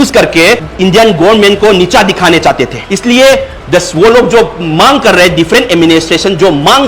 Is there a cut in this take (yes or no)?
yes